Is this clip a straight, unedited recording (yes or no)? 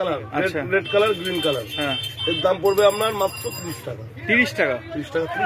yes